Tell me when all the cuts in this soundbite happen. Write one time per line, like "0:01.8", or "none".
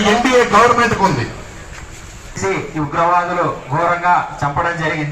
0:02.4